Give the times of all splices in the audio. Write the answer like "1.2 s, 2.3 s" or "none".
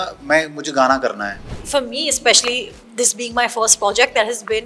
1.6 s